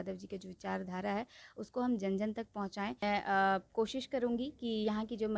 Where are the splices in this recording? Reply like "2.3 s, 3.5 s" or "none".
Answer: 3.0 s

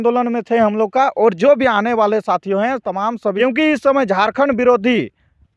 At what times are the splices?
3.4 s

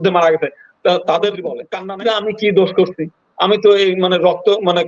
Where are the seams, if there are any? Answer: 1.7 s

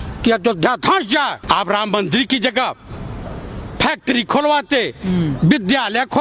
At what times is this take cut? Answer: 1.4 s

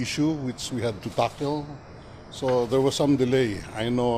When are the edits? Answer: 2.7 s

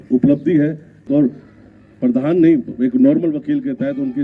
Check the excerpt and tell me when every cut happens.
1.0 s

